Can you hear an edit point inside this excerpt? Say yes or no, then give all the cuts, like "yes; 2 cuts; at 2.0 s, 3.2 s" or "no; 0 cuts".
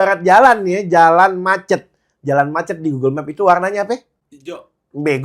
no; 0 cuts